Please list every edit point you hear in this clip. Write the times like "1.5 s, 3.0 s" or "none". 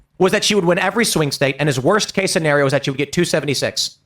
2.2 s